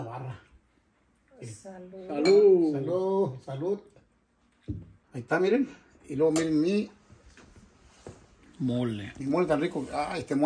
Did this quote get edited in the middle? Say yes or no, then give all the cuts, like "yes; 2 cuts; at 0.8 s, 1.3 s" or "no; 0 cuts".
yes; 1 cut; at 4.9 s